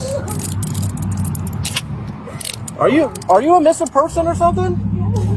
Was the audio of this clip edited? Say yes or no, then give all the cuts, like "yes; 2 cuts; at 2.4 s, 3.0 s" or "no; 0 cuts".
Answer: no; 0 cuts